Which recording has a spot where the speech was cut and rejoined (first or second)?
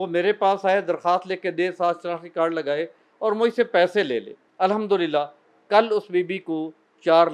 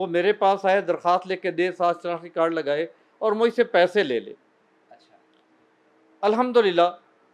first